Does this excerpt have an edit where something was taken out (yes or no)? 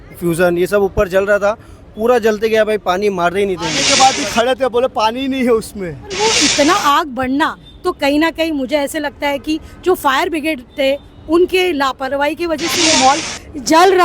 yes